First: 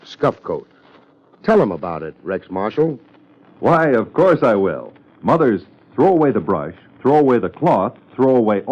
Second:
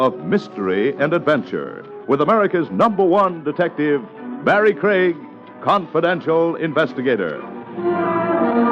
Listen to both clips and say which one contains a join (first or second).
first